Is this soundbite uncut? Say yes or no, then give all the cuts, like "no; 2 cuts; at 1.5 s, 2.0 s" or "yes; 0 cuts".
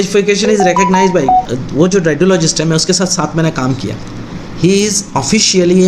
no; 1 cut; at 1.6 s